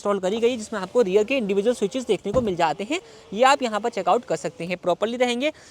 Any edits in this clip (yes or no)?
no